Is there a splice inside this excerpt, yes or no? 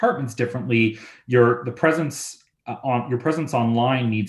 no